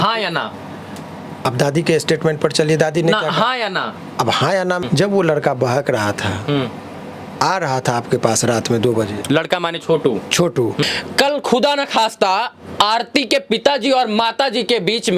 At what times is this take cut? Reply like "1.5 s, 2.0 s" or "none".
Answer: 4.8 s, 10.8 s